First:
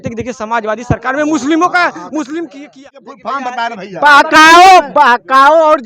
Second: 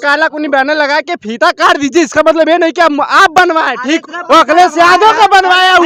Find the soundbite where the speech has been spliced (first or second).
first